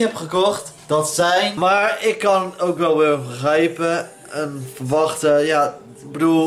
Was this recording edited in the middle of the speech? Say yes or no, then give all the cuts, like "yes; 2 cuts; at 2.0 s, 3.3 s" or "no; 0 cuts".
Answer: yes; 1 cut; at 1.5 s